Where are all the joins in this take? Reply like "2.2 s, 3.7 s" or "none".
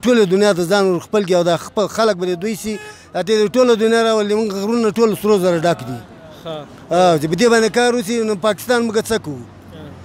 none